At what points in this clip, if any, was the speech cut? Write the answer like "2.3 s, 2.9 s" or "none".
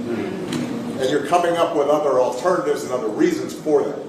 1.0 s